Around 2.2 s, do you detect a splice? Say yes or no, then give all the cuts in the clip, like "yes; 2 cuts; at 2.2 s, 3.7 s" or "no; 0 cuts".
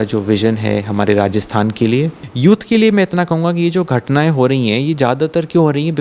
yes; 1 cut; at 2.2 s